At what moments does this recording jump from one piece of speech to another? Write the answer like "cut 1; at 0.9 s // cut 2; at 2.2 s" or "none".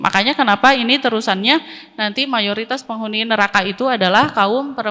none